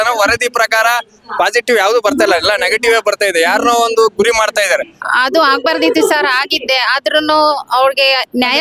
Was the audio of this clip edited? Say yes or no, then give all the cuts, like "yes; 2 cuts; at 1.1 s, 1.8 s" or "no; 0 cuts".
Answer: yes; 1 cut; at 5.1 s